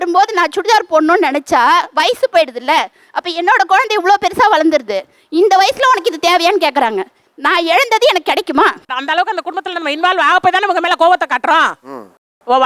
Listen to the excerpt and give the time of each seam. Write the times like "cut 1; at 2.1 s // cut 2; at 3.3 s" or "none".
cut 1; at 8.9 s